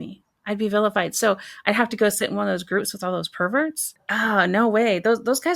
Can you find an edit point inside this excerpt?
yes; 1 cut; at 3.9 s

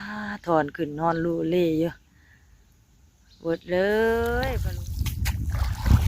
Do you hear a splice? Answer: yes; 1 cut; at 4.5 s

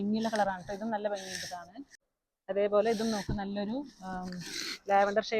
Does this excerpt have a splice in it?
no; 0 cuts

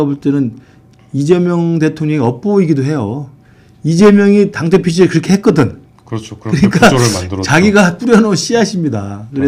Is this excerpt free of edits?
yes; 0 cuts

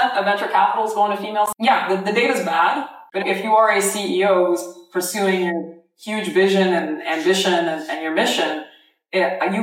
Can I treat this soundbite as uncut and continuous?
no; 2 cuts; at 1.6 s, 3.0 s

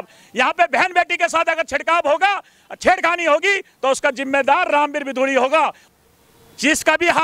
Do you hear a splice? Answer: yes; 1 cut; at 5.8 s

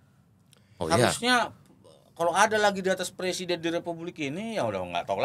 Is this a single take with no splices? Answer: yes; 0 cuts

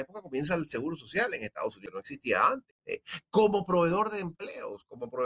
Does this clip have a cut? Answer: yes; 2 cuts; at 1.8 s, 3.1 s

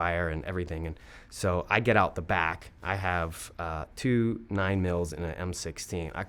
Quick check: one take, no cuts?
yes; 0 cuts

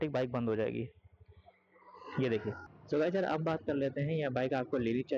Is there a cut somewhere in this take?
yes; 1 cut; at 2.7 s

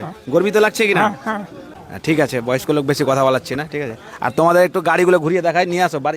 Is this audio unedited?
yes; 0 cuts

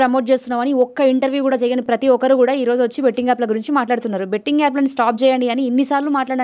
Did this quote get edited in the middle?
no; 0 cuts

